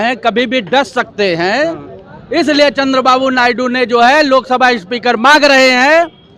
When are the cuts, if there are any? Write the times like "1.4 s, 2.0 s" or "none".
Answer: none